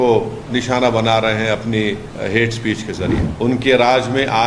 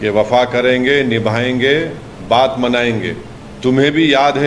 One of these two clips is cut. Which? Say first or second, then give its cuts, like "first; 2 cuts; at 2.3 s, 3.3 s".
first; 1 cut; at 3.3 s